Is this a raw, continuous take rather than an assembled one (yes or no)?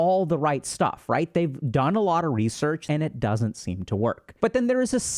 no